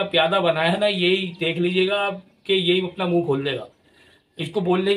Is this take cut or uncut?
uncut